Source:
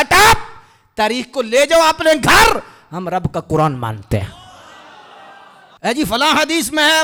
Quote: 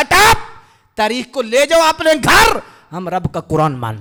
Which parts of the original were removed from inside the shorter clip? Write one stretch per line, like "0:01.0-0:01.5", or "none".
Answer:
none